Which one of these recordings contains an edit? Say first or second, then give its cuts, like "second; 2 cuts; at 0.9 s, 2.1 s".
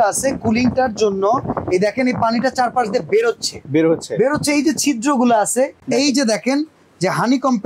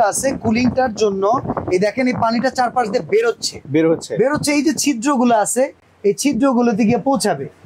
first; 1 cut; at 5.8 s